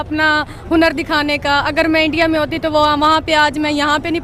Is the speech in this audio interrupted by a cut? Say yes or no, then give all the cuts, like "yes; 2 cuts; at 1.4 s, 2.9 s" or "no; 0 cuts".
no; 0 cuts